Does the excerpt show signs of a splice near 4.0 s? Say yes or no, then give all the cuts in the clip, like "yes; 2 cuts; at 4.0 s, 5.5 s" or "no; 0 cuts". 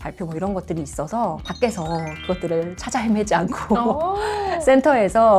no; 0 cuts